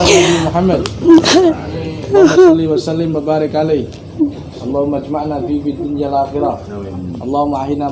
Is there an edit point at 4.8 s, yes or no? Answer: no